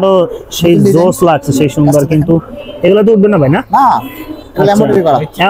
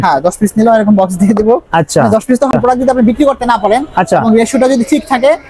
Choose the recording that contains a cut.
second; 1 cut; at 2.5 s

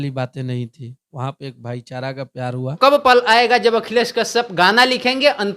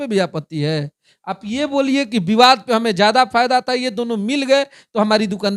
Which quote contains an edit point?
first; 1 cut; at 2.7 s

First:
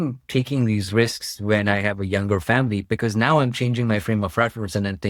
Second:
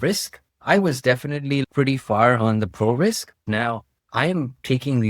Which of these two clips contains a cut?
second; 2 cuts; at 1.6 s, 3.4 s

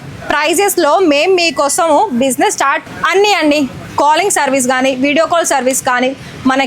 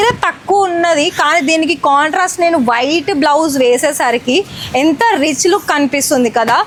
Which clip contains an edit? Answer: first; 1 cut; at 2.9 s

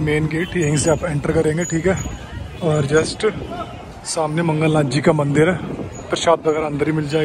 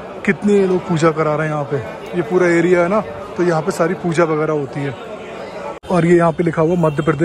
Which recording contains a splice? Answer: second; 1 cut; at 5.7 s

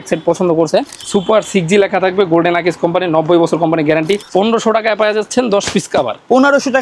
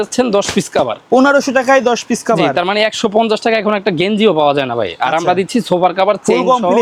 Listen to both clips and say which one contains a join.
first; 2 cuts; at 1.0 s, 4.2 s

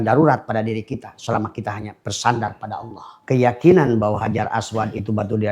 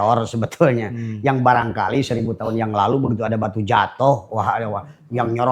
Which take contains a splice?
first; 1 cut; at 3.3 s

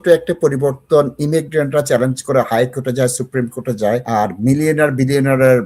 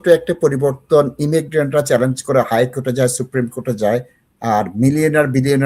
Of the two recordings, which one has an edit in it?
first; 1 cut; at 4.0 s

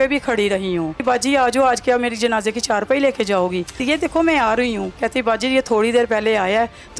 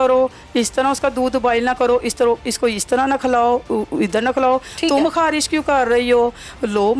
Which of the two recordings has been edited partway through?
first; 3 cuts; at 1.0 s, 3.8 s, 4.9 s

